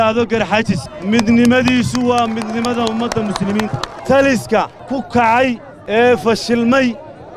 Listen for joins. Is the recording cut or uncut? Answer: cut